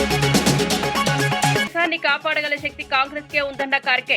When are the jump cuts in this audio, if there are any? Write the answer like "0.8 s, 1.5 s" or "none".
1.6 s